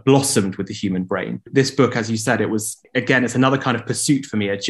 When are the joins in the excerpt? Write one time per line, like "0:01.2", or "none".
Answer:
0:01.5
0:02.8